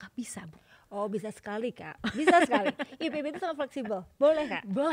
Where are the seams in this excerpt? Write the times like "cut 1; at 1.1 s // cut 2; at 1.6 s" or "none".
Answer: none